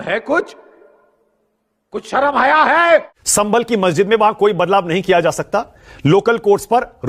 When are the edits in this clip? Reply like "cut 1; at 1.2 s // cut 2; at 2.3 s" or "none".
cut 1; at 3.2 s